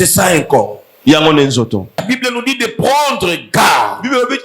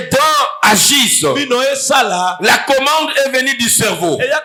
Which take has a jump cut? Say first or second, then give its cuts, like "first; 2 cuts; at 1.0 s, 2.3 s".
first; 1 cut; at 2.0 s